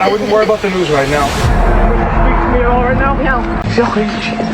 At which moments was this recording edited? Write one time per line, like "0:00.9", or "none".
0:03.6